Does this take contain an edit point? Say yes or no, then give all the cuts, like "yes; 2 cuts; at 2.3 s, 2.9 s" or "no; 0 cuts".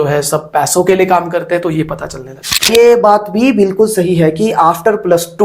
yes; 1 cut; at 2.7 s